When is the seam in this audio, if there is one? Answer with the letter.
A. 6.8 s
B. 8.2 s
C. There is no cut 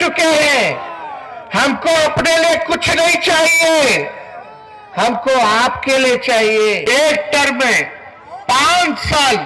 A